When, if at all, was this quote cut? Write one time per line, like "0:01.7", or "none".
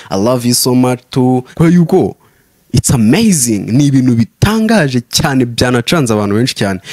0:01.5